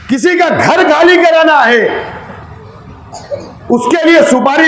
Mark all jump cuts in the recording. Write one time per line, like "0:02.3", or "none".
none